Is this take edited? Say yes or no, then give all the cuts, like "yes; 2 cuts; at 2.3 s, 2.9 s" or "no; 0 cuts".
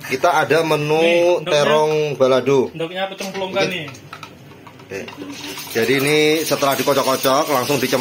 no; 0 cuts